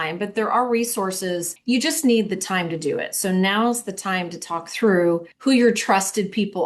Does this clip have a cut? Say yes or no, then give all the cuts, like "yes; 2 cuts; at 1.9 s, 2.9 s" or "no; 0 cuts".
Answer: yes; 2 cuts; at 1.5 s, 5.3 s